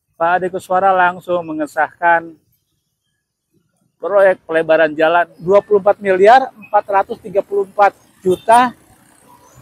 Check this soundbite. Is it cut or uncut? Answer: cut